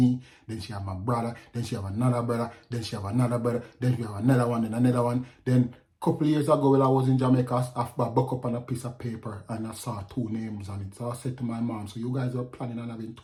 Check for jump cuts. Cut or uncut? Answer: uncut